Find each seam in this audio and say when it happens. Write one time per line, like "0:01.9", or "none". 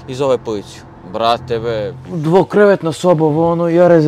0:02.0